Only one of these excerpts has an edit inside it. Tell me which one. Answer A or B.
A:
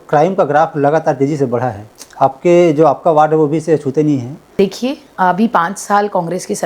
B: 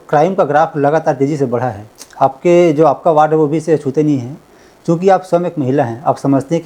A